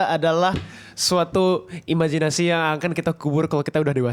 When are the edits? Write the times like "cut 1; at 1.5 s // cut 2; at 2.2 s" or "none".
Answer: none